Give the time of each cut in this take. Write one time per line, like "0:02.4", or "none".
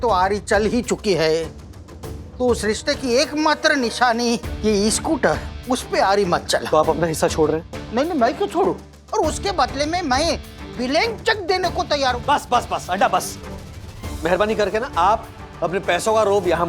0:06.6
0:08.9
0:12.1